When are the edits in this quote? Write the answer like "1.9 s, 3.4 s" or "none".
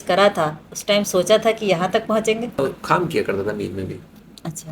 2.6 s